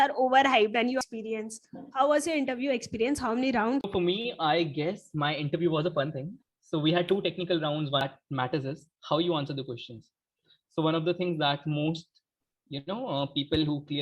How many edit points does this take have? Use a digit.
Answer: 2